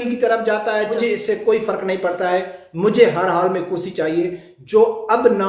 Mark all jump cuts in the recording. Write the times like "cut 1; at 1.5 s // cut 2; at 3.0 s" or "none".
cut 1; at 1.0 s

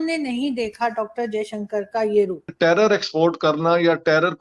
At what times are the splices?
cut 1; at 2.5 s

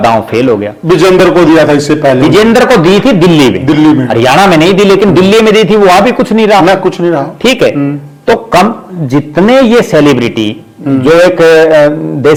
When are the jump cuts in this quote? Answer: none

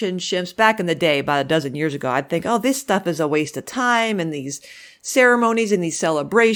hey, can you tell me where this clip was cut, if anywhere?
none

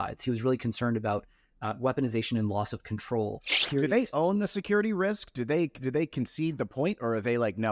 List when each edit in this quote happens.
cut 1; at 3.6 s

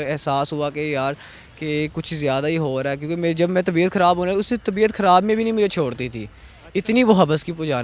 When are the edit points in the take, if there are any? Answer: none

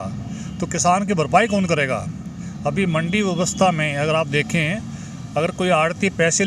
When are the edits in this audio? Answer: none

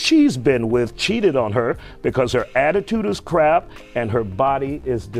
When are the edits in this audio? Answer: none

